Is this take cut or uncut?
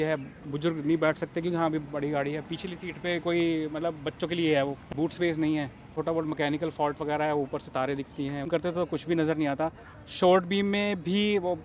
cut